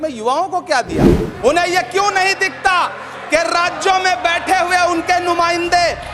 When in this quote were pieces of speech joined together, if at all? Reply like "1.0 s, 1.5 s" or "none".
1.2 s